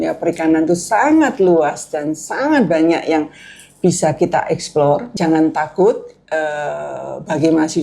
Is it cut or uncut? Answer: cut